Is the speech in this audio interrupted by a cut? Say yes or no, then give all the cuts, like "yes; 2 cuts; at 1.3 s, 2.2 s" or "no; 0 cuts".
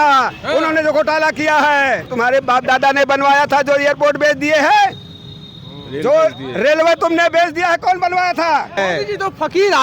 yes; 2 cuts; at 2.1 s, 8.8 s